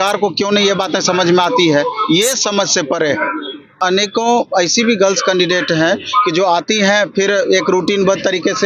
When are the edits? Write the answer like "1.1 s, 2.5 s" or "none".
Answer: 3.7 s